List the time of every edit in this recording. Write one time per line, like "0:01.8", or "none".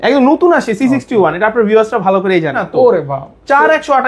0:02.6